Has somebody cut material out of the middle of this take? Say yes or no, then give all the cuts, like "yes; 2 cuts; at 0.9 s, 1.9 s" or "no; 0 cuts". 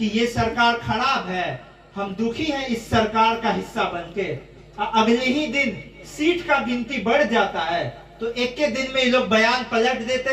no; 0 cuts